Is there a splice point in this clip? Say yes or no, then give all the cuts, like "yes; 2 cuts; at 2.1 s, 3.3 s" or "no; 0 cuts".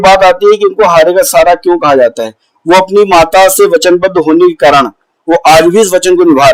no; 0 cuts